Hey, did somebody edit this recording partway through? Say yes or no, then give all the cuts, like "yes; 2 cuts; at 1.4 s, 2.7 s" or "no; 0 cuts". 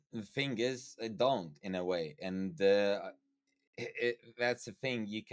no; 0 cuts